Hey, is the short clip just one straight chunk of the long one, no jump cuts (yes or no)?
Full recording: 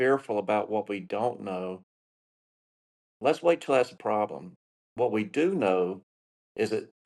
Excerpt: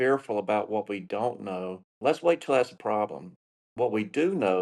no